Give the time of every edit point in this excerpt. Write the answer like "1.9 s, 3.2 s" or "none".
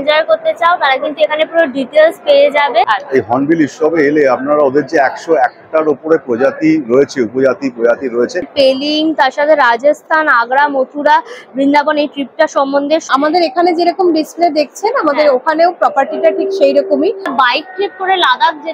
2.8 s, 8.5 s, 13.1 s, 17.3 s